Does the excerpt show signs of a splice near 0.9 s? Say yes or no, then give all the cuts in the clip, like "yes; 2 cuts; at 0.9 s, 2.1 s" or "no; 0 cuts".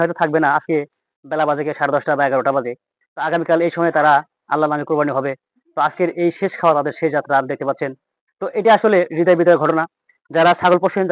no; 0 cuts